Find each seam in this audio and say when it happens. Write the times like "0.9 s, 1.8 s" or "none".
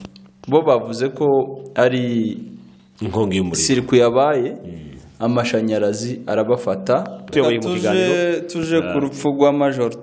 7.3 s